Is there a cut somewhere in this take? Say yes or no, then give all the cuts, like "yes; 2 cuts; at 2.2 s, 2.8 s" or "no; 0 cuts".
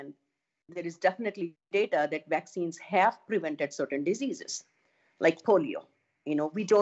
no; 0 cuts